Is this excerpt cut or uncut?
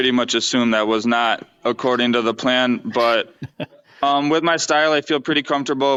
uncut